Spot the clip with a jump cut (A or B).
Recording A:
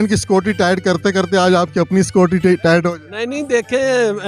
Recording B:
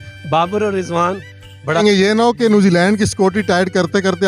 B